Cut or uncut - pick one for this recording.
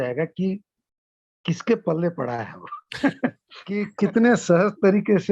cut